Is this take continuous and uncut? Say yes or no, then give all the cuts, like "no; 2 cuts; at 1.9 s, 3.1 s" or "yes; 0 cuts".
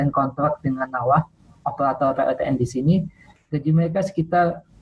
yes; 0 cuts